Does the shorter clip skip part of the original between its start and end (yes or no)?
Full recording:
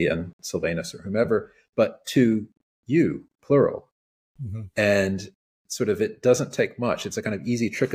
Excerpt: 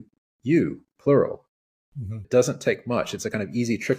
yes